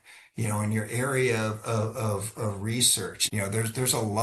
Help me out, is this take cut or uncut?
cut